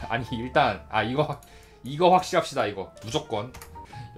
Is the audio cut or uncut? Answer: cut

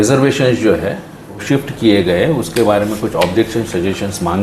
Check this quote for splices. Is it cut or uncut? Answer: cut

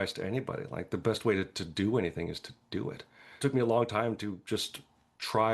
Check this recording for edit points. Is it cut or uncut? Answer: cut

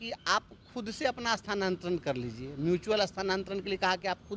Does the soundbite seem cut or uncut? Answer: uncut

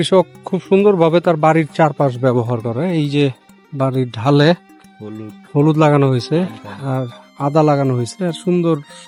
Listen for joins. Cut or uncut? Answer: uncut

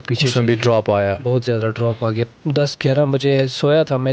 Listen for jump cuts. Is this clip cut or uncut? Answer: cut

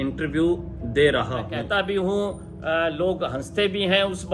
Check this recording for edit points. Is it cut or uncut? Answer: cut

